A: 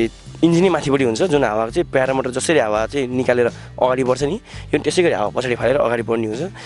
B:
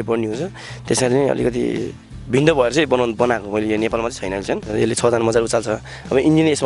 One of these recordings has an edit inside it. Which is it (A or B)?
B